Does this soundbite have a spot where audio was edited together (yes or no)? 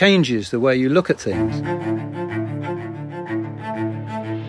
yes